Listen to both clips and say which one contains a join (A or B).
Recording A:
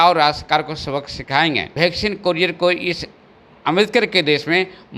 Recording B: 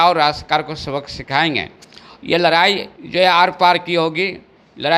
A